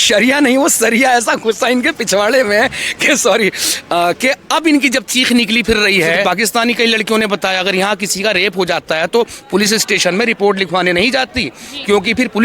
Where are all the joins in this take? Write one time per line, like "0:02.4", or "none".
0:06.2